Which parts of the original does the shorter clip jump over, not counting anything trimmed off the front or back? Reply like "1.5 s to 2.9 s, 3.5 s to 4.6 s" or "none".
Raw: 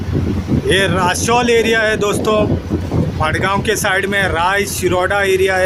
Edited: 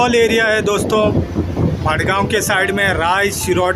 none